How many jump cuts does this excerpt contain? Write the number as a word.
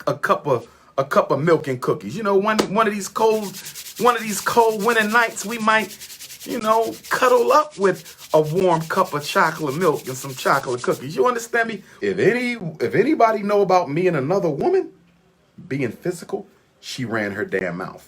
one